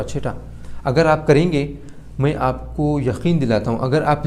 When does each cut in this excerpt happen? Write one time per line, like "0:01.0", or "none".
none